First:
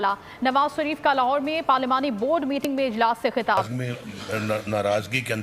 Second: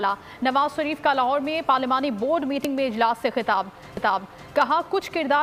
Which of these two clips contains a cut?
first; 1 cut; at 3.7 s

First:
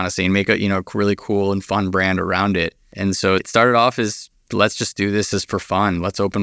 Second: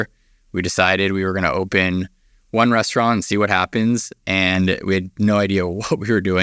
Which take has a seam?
first; 1 cut; at 2.8 s

